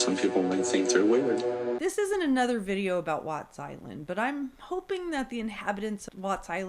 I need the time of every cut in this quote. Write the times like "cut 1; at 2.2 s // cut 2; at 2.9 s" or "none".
cut 1; at 1.8 s